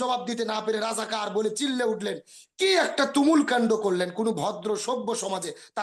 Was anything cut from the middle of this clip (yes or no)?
no